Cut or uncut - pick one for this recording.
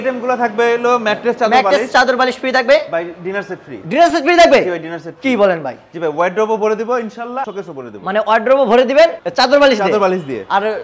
uncut